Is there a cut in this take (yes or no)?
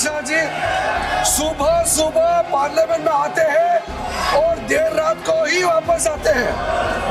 no